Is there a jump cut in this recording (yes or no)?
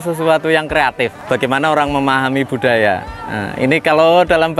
yes